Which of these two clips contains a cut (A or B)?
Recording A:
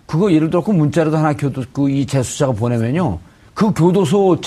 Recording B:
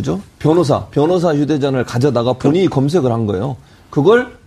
A